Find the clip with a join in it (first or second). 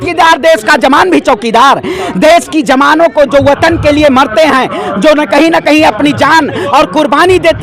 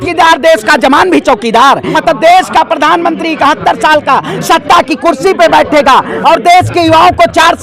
second